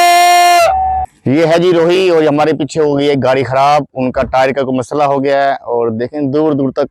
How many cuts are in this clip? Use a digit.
1